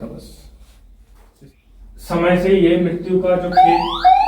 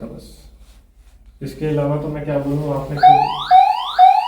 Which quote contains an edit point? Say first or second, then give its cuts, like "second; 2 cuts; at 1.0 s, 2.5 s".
first; 1 cut; at 1.1 s